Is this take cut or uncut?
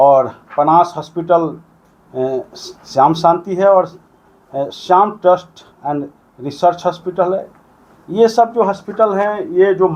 uncut